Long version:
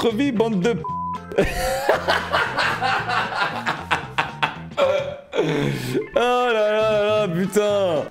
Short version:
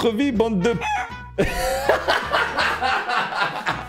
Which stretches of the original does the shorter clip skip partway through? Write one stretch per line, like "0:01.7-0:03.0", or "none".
none